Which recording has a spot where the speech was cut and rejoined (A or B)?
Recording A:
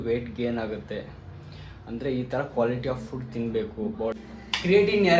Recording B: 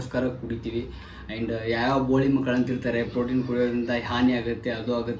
A